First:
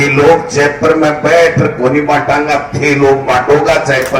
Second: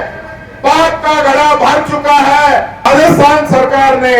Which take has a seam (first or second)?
second